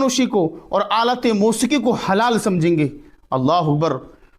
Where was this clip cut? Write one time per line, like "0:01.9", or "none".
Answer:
none